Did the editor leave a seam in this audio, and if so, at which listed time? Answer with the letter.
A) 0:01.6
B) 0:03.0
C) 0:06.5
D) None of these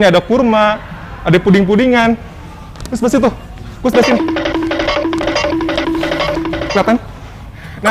D